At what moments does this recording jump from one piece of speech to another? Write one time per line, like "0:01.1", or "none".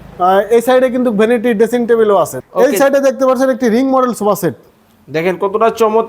0:02.4